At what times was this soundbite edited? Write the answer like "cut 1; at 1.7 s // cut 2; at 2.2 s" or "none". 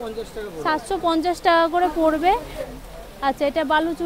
cut 1; at 2.6 s

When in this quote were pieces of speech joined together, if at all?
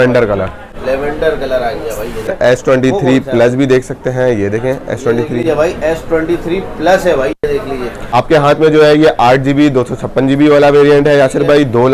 cut 1; at 2.3 s // cut 2; at 8.0 s

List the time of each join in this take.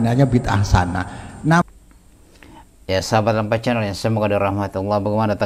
cut 1; at 1.6 s

